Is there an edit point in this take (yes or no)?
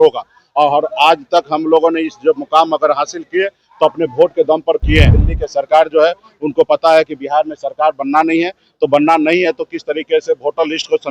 yes